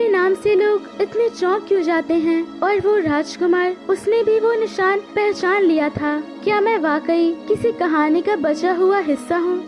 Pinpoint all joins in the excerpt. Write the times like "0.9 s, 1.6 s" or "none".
0.9 s, 2.5 s, 3.8 s, 5.1 s, 6.3 s, 7.4 s